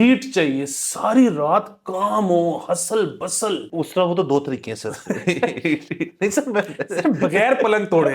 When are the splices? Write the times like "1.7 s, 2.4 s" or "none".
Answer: 3.7 s